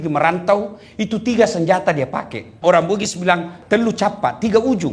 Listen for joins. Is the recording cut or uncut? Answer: cut